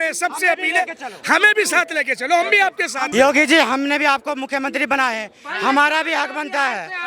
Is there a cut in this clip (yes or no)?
yes